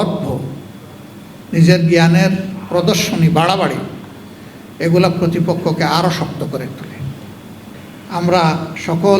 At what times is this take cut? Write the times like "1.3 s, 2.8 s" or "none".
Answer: 7.7 s